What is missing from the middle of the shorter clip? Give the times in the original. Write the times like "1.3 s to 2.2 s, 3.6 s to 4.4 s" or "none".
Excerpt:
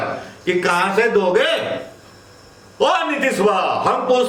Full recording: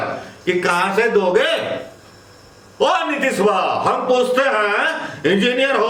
none